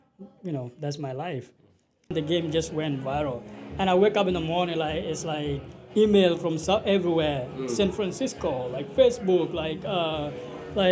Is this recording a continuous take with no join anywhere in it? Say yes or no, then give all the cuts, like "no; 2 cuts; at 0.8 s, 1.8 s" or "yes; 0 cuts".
no; 1 cut; at 2.1 s